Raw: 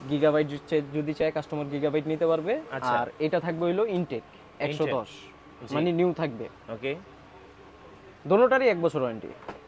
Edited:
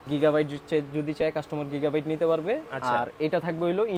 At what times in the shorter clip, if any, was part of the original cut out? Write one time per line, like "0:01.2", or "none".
none